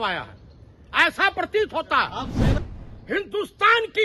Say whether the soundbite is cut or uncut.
cut